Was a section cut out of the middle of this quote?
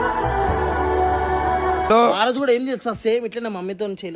yes; 1 cut; at 1.9 s

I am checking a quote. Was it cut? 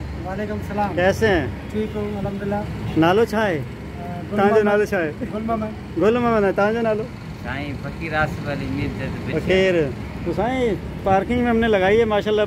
no; 0 cuts

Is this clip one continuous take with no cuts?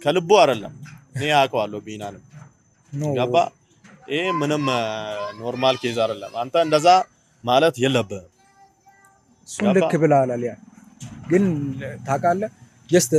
yes; 0 cuts

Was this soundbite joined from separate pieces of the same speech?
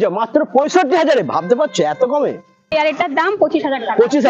yes; 1 cut; at 2.7 s

